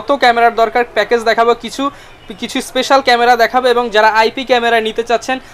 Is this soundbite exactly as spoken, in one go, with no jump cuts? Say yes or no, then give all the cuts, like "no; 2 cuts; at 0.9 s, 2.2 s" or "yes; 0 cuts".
yes; 0 cuts